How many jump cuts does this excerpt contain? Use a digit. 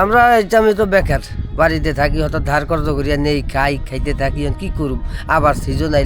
0